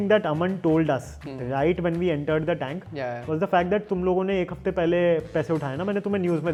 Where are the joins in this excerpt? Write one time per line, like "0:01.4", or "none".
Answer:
none